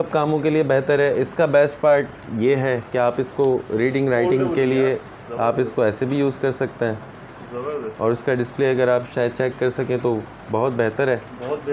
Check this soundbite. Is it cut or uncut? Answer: uncut